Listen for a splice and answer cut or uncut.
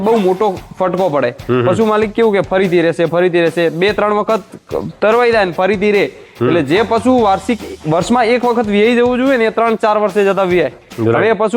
uncut